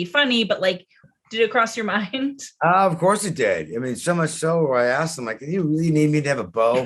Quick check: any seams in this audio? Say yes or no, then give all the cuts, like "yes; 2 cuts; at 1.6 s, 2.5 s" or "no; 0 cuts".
yes; 1 cut; at 1.0 s